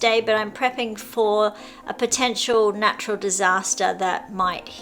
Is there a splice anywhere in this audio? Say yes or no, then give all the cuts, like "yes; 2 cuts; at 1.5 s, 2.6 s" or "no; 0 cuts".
no; 0 cuts